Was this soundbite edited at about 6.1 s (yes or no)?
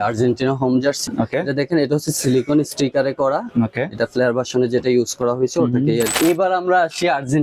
yes